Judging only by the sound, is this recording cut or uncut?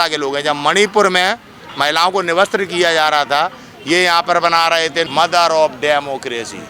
cut